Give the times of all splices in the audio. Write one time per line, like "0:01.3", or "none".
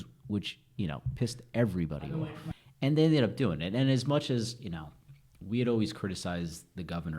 0:02.3